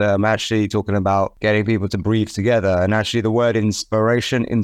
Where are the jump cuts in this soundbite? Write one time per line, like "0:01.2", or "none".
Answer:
0:01.4